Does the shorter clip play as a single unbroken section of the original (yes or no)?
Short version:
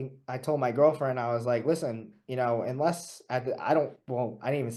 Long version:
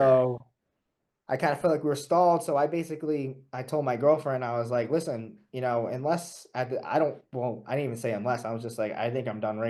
yes